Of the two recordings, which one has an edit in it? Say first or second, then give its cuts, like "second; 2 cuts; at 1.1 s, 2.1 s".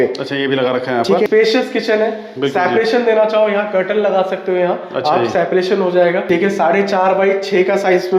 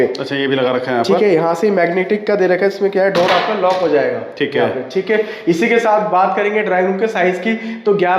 first; 2 cuts; at 1.3 s, 6.3 s